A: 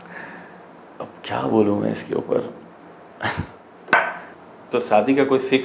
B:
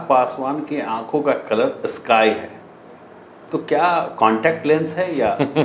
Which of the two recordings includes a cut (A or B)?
A